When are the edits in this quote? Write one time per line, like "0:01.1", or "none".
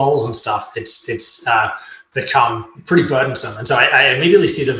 0:02.7